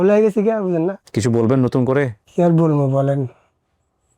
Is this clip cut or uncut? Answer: cut